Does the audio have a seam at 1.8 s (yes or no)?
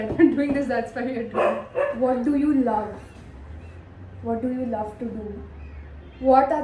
yes